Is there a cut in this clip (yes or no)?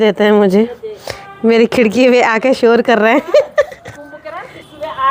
no